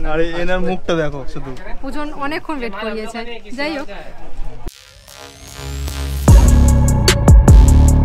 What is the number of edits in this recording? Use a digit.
1